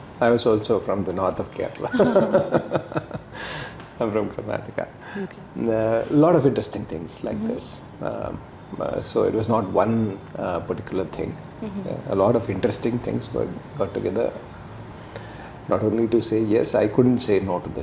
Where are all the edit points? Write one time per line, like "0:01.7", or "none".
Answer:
none